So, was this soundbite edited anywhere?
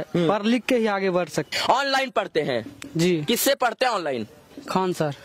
yes; 1 cut; at 1.5 s

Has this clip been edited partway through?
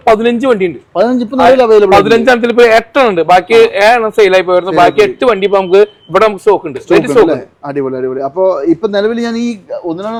no; 0 cuts

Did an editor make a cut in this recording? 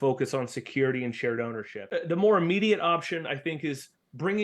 yes; 1 cut; at 1.9 s

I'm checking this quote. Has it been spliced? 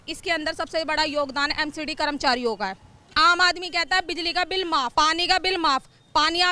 yes; 2 cuts; at 3.1 s, 4.9 s

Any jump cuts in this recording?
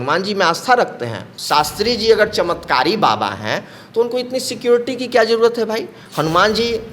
yes; 1 cut; at 1.3 s

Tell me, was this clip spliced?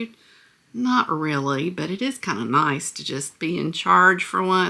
no; 0 cuts

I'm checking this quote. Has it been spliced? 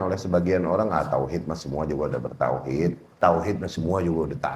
yes; 1 cut; at 3.2 s

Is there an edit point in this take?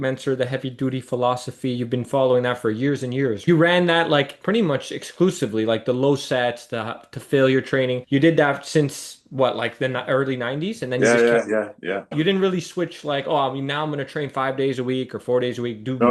yes; 2 cuts; at 3.4 s, 12.2 s

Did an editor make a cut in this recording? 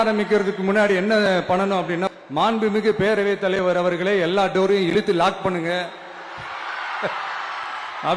yes; 1 cut; at 2.0 s

